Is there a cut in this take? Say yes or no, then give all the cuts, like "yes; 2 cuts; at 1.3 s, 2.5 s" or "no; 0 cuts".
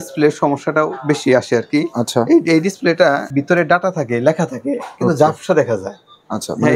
yes; 1 cut; at 3.3 s